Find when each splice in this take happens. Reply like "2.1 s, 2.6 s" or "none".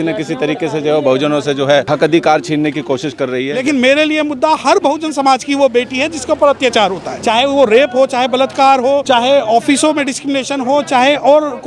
1.9 s, 3.6 s, 7.1 s, 9.0 s